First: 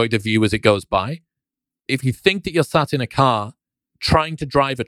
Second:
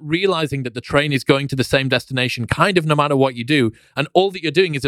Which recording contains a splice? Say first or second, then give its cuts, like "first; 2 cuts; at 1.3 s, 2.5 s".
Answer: first; 1 cut; at 1.7 s